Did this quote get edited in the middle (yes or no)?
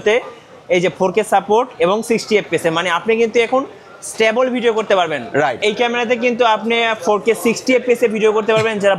no